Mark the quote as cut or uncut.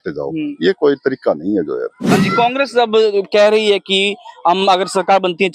cut